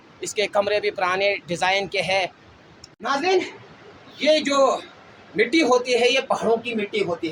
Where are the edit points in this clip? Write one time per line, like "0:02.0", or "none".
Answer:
none

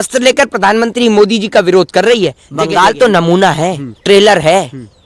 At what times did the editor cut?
0:02.4
0:03.9

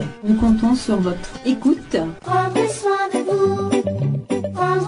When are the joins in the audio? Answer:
0:02.1

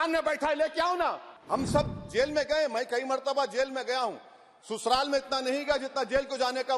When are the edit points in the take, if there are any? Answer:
0:01.3

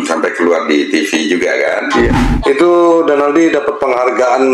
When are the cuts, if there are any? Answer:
0:02.3

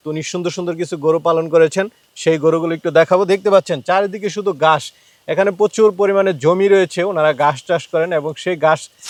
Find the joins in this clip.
none

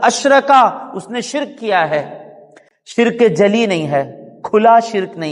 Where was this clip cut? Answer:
none

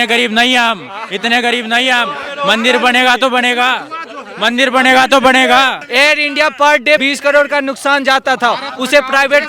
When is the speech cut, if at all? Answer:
0:05.8
0:07.0

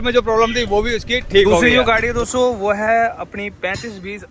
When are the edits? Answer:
0:01.6

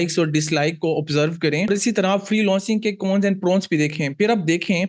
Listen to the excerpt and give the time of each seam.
0:01.7

